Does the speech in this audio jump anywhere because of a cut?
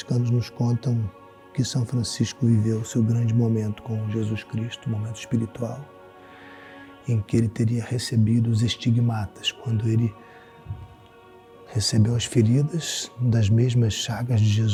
no; 0 cuts

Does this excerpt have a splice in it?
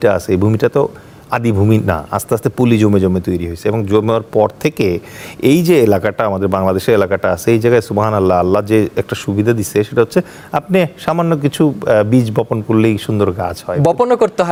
no; 0 cuts

